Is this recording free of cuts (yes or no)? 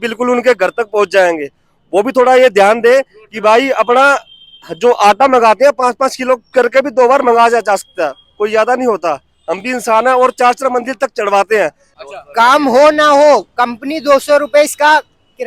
no